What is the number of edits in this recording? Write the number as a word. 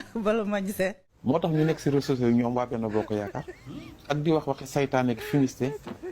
one